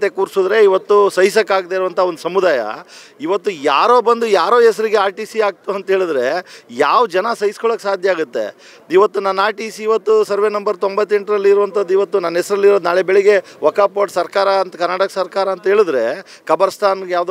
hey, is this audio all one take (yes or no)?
yes